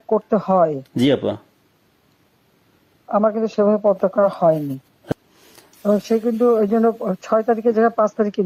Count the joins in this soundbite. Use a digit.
1